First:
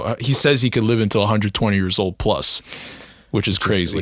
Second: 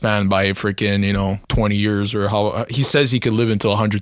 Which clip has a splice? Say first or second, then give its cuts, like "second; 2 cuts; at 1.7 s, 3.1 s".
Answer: second; 1 cut; at 1.4 s